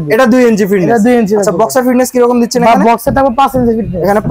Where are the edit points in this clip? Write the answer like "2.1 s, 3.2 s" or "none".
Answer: none